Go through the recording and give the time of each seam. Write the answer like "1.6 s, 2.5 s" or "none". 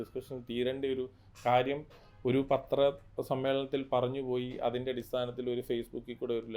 none